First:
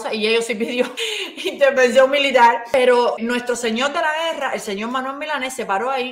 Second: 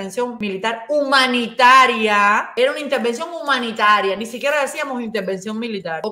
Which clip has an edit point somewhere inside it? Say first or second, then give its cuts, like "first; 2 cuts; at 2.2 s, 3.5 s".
first; 1 cut; at 3.2 s